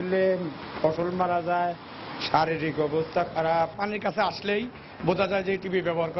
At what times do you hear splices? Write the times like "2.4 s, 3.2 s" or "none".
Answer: 3.8 s